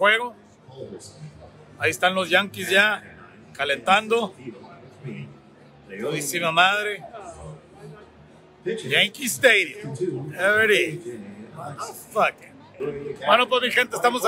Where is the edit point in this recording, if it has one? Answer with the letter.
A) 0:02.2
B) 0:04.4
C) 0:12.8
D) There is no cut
C